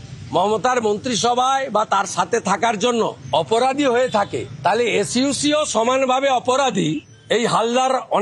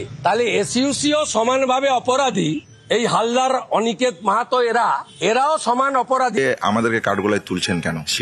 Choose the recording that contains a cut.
second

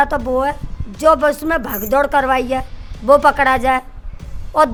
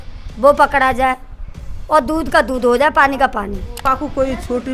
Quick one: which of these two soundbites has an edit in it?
second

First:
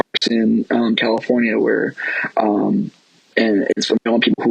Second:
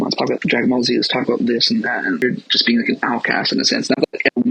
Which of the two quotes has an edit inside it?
second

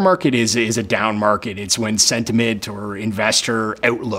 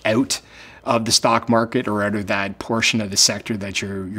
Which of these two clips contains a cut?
first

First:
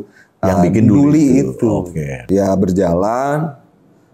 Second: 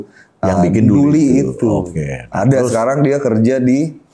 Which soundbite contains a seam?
first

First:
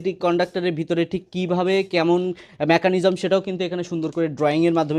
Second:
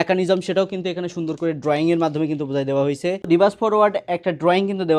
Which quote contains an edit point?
second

